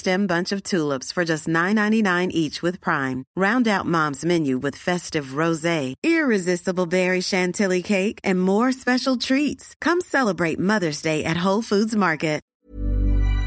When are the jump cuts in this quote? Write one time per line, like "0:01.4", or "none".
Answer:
0:12.5